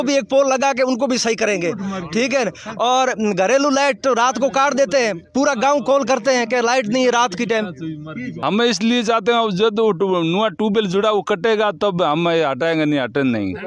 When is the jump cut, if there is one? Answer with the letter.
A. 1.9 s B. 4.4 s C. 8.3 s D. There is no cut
C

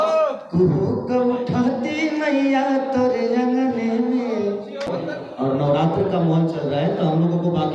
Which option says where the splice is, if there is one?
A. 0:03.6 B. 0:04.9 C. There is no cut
B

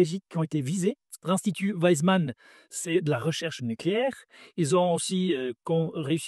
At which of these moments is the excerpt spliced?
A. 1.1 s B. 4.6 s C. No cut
A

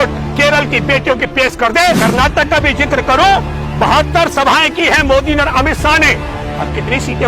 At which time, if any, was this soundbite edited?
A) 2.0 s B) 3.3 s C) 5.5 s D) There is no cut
A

